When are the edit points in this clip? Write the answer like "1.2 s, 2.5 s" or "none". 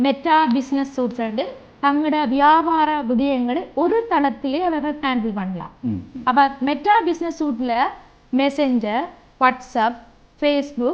none

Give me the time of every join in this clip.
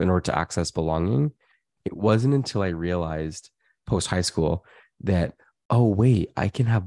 1.7 s

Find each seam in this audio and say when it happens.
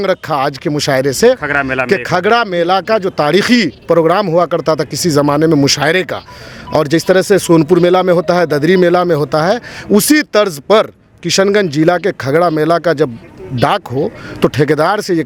none

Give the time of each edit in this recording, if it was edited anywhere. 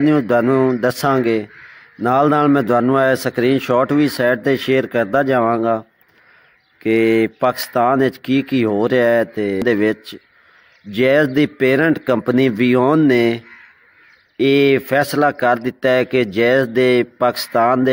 9.6 s

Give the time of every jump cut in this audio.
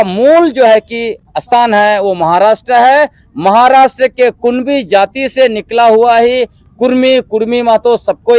none

